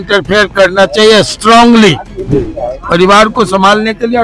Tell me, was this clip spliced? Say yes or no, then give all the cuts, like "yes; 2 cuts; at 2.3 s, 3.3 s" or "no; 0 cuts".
no; 0 cuts